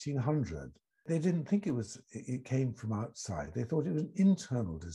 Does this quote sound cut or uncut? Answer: cut